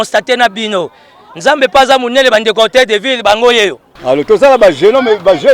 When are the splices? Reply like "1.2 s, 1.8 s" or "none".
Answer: 3.9 s